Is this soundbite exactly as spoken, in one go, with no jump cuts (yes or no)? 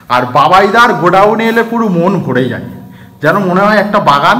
yes